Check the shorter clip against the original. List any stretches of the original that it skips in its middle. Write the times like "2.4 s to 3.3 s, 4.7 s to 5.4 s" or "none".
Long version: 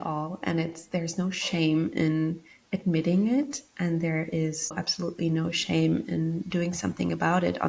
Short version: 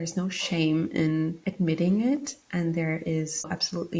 2.4 s to 2.7 s